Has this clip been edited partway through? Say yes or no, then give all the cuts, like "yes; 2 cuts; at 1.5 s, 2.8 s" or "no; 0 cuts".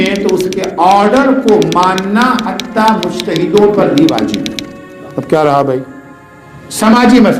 no; 0 cuts